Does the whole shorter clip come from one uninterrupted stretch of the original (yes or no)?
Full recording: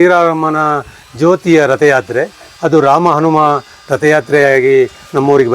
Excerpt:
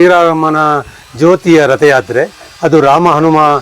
yes